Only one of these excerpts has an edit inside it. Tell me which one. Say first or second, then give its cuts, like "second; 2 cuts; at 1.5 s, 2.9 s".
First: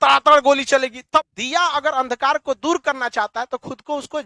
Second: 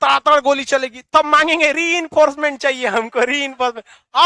first; 1 cut; at 1.1 s